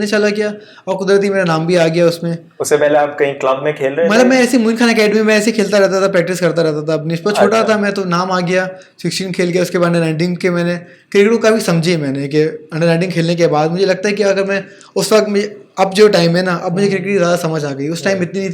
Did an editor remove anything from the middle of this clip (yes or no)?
no